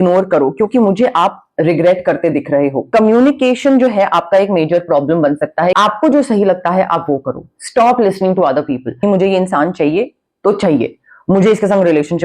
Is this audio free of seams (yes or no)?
no